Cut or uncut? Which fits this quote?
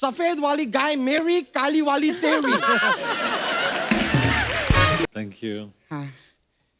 cut